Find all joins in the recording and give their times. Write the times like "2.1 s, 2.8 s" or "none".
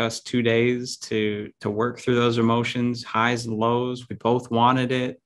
none